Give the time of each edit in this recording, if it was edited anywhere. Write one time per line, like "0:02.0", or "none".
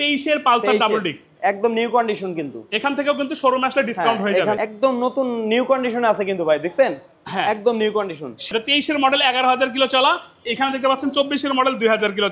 0:04.6
0:08.5